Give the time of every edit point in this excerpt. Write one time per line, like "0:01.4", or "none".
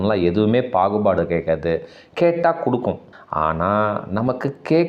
0:03.1